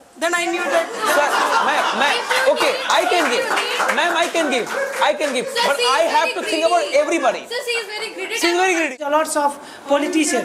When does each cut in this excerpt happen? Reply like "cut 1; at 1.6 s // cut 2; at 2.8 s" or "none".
cut 1; at 9.0 s